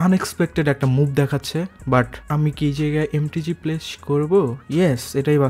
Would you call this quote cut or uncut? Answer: cut